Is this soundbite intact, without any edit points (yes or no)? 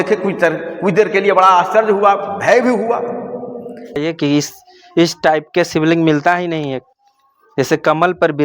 no